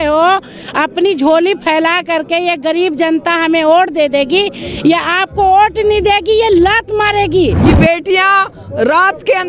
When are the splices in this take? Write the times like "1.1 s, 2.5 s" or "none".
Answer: 7.6 s